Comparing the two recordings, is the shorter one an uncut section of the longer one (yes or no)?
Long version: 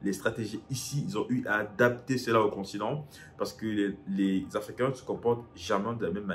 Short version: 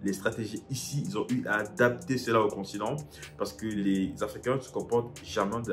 no